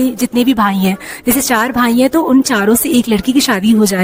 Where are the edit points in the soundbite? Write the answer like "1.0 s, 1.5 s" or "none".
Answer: none